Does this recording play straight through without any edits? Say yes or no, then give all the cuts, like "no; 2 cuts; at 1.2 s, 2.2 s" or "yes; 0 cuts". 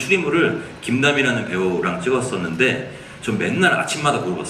yes; 0 cuts